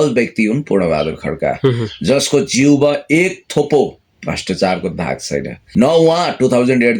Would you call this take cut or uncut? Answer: cut